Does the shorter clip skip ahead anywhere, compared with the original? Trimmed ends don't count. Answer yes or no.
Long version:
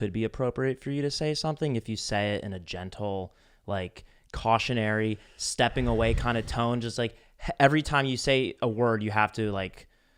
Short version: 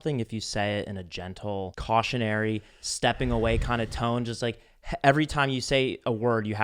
yes